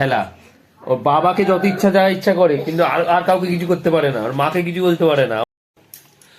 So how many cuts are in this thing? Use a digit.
1